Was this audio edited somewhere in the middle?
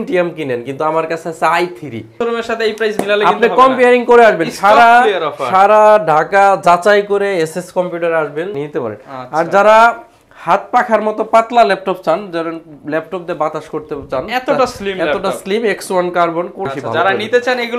yes; 3 cuts; at 2.2 s, 8.6 s, 16.6 s

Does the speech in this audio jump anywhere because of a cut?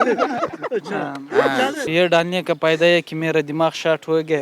yes; 1 cut; at 1.8 s

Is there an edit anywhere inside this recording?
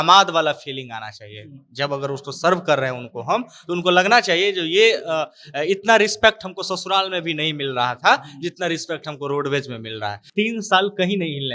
yes; 1 cut; at 10.2 s

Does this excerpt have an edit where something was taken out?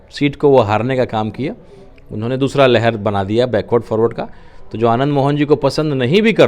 no; 0 cuts

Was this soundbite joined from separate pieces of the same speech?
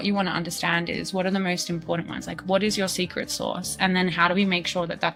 no; 0 cuts

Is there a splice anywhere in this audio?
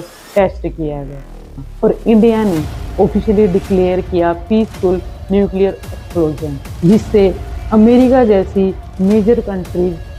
yes; 1 cut; at 1.5 s

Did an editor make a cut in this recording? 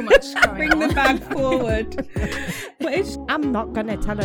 yes; 1 cut; at 3.2 s

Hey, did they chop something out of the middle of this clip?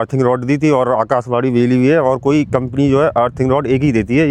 no; 0 cuts

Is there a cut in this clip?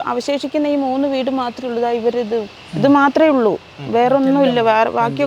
no; 0 cuts

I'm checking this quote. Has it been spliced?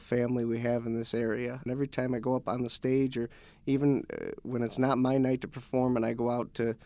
yes; 1 cut; at 1.6 s

